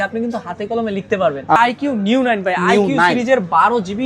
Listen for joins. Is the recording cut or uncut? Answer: cut